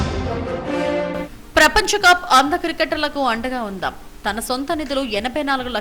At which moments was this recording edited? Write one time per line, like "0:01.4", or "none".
0:01.0

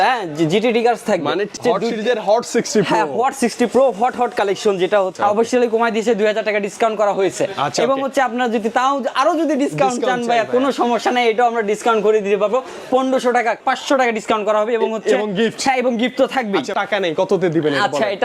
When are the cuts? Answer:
0:01.5
0:05.1
0:13.6
0:16.7

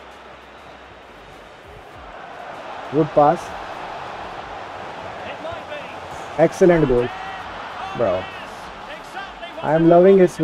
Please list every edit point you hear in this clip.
none

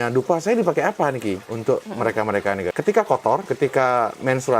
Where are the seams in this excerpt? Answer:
0:01.5
0:02.7
0:03.5

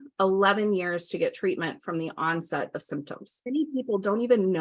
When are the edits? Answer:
0:03.4

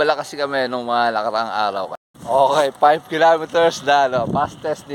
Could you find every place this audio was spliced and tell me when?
0:02.0

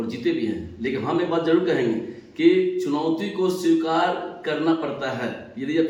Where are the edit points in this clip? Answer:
none

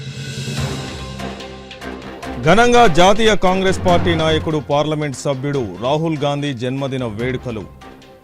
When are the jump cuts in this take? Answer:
0:01.0

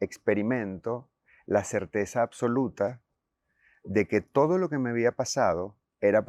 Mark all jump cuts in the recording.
none

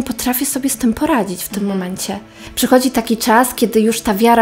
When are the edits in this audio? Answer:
0:02.4

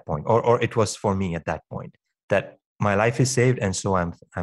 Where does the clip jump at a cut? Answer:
none

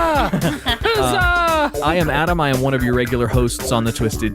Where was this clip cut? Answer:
0:01.4

